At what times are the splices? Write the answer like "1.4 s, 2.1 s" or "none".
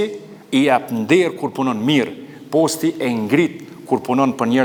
none